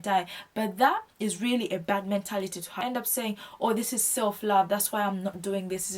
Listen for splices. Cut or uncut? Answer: cut